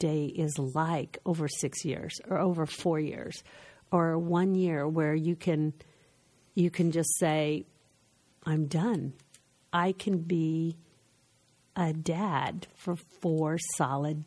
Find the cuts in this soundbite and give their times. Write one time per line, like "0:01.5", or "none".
none